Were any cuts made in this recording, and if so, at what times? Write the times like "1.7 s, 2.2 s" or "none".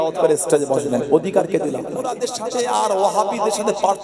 2.2 s

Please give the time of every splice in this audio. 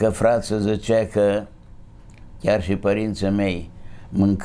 none

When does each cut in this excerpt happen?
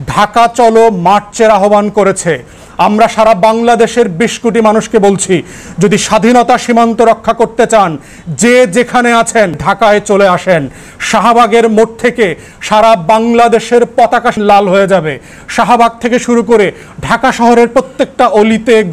9.6 s, 14.4 s

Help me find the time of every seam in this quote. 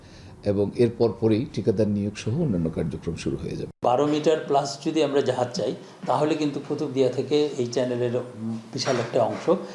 3.8 s

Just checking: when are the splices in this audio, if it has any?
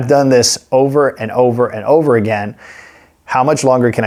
none

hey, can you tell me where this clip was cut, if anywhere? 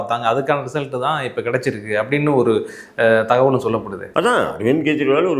4.0 s

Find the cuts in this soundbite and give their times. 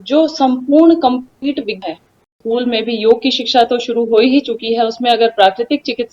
2.3 s

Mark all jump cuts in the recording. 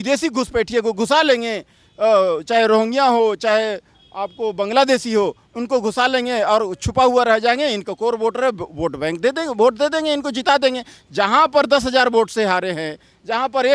none

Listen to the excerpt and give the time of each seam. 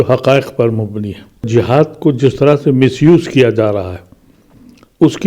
1.5 s

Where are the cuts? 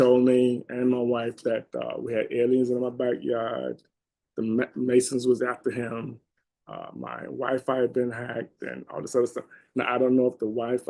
none

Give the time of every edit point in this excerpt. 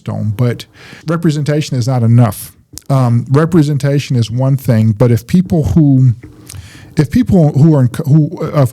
1.0 s

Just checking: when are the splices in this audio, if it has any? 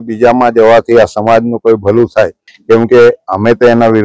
2.5 s

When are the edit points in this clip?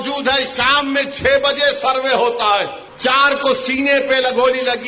2.8 s

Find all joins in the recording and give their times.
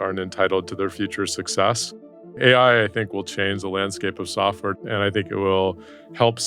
2.4 s, 4.8 s

